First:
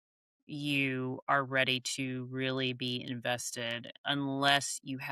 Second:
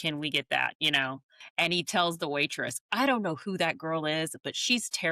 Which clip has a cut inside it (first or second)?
second